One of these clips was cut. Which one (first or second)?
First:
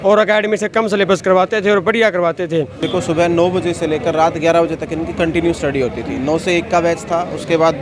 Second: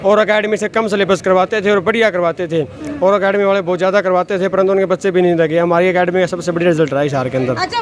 first